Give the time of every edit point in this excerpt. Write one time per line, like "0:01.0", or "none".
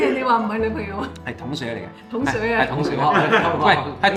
none